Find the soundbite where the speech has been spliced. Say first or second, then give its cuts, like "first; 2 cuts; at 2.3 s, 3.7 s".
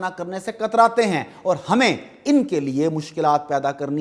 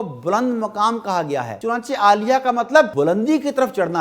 second; 2 cuts; at 1.5 s, 2.9 s